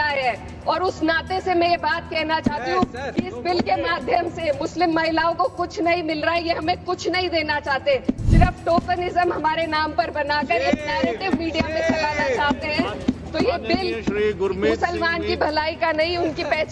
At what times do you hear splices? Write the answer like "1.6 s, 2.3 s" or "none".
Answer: none

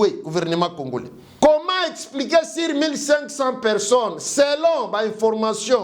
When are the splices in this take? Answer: 1.2 s

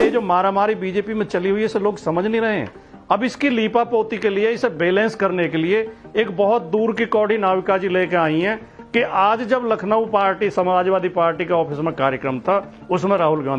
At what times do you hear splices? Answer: none

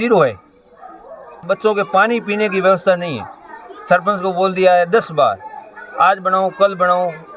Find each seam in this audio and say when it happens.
1.5 s

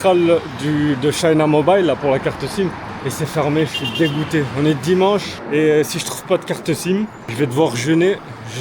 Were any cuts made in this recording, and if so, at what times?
2.9 s, 5.4 s, 7.2 s

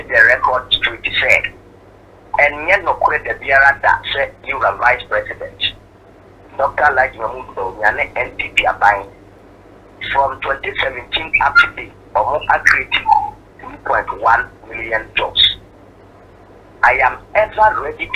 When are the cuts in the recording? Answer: none

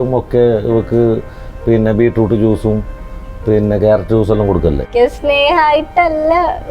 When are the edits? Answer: 4.9 s

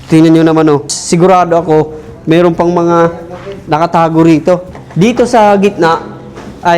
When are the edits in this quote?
0.9 s, 4.8 s

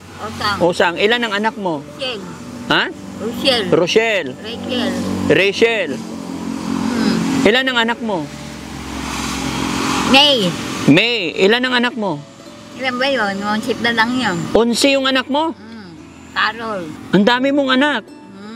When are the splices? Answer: 17.0 s

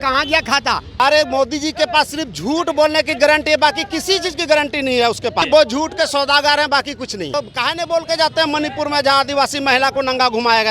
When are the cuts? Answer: 1.0 s, 5.4 s, 7.3 s

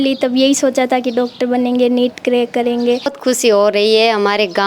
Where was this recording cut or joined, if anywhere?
3.1 s

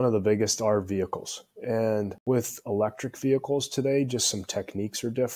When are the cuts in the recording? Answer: 2.2 s

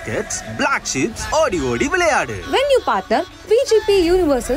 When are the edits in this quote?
2.4 s

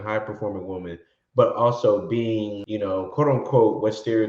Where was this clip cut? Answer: 2.6 s

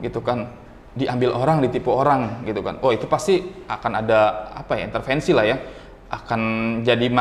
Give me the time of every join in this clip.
none

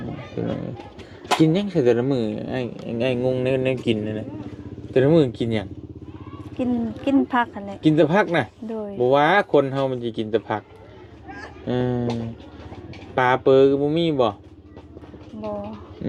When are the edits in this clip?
none

